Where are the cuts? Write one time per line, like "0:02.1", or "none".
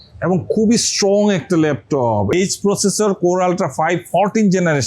0:02.3